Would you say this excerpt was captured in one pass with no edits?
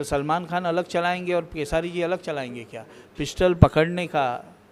yes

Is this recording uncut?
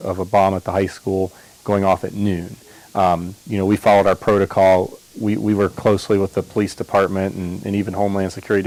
yes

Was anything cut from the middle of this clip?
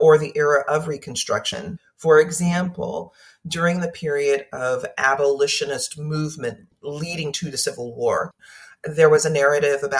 yes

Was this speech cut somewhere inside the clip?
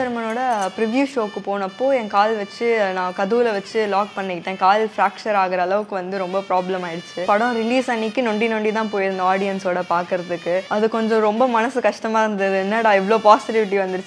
yes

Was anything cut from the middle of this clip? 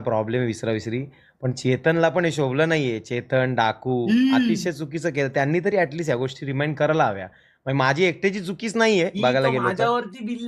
no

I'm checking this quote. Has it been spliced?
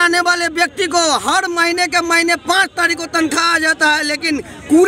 no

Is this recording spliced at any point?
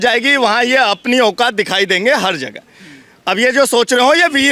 no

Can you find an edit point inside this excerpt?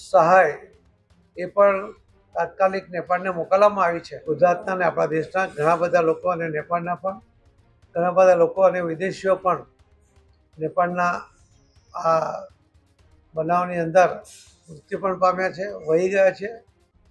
yes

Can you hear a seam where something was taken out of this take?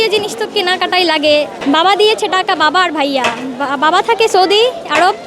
yes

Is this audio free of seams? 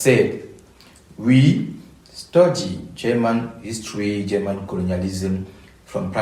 yes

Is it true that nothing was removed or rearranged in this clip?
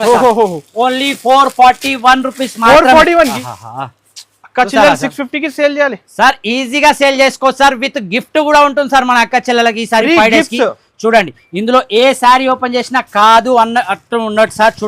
no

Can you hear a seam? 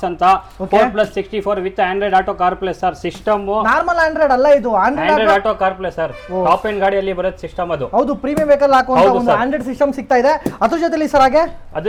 no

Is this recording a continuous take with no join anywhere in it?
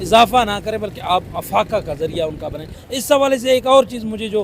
no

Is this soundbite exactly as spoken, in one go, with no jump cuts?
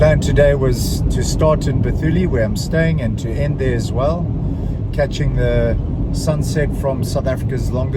yes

